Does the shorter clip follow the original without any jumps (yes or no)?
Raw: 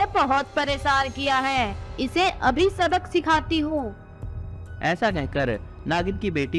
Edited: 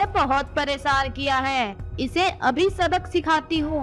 yes